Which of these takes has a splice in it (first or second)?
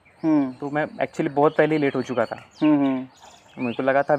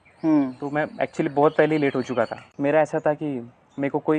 second